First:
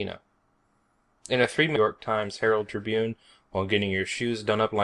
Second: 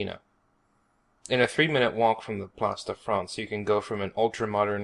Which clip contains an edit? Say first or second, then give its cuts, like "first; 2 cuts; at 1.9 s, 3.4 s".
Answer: second; 1 cut; at 1.8 s